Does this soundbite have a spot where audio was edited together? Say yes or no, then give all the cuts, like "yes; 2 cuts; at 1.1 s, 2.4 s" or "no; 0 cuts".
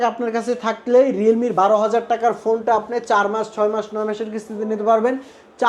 no; 0 cuts